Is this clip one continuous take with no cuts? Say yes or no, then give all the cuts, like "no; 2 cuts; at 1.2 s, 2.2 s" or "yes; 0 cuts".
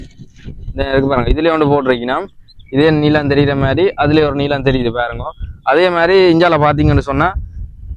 yes; 0 cuts